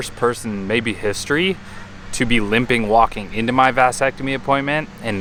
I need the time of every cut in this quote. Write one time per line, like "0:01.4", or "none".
none